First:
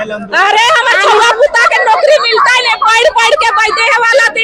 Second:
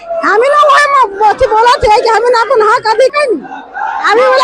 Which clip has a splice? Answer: second; 1 cut; at 3.1 s

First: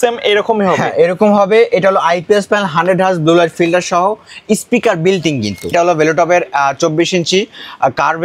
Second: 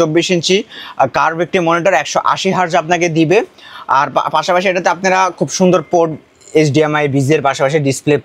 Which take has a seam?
first; 1 cut; at 5.7 s

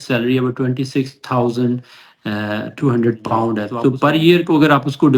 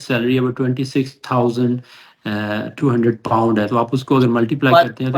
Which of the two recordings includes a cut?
first; 1 cut; at 3.7 s

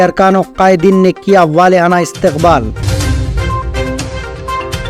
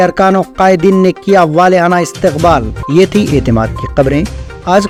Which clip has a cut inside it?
first; 1 cut; at 2.8 s

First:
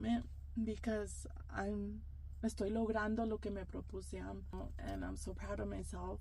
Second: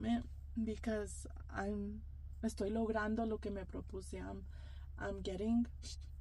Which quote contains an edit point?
first; 1 cut; at 4.6 s

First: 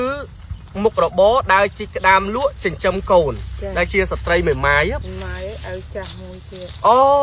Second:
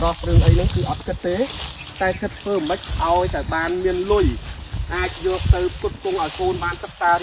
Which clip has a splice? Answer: first; 1 cut; at 5.0 s

